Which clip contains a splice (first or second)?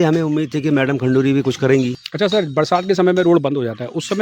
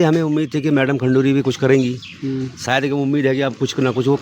first